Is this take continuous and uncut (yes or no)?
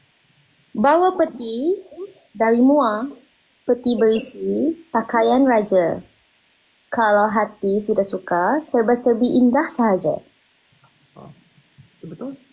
yes